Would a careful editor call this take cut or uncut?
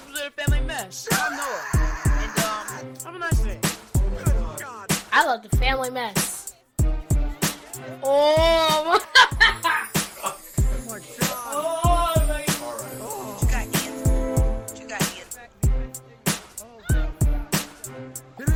uncut